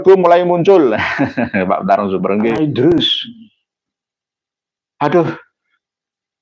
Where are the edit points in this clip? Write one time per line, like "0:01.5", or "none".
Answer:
0:02.5